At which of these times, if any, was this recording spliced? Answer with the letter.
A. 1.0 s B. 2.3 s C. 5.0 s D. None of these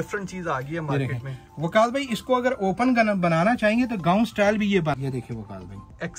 C